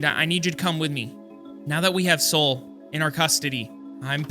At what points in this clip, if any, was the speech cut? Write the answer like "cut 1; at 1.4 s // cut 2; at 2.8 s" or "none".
cut 1; at 1.2 s